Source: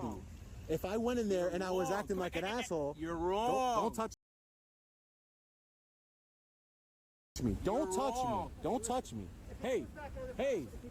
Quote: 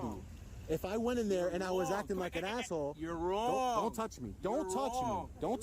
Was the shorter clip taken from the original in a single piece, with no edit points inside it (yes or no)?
no